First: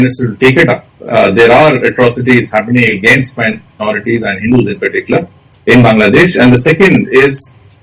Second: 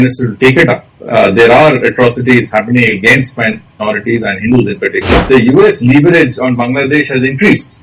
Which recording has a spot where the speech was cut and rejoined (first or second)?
second